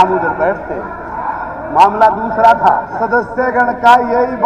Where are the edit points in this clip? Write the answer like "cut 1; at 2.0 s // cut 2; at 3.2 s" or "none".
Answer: cut 1; at 2.8 s